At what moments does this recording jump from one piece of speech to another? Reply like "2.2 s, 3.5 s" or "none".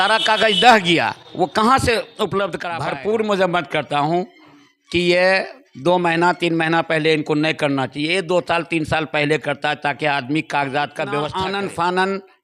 2.7 s, 11.4 s